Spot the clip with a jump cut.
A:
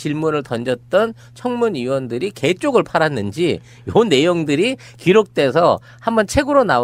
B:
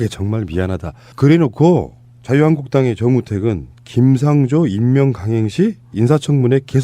B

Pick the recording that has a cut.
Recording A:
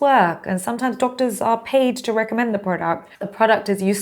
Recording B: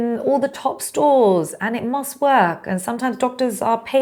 A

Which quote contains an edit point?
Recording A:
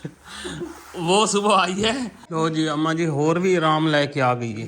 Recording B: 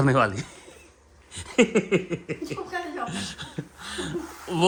A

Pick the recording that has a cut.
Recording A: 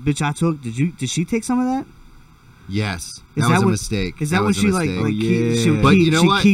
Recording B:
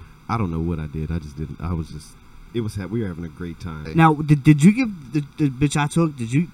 B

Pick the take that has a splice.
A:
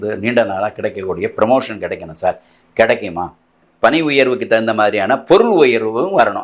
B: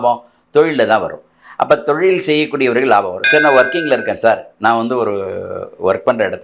A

